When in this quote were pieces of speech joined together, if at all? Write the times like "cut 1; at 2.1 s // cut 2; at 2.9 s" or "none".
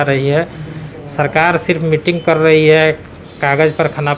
none